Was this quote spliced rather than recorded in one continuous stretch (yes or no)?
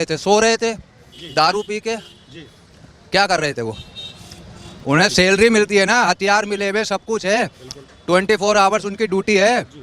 no